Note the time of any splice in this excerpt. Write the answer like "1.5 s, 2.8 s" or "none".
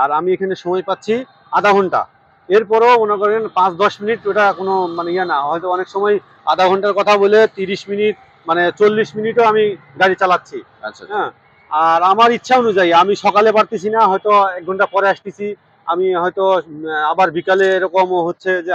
none